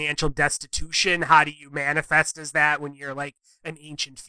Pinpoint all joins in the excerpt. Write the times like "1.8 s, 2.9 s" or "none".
none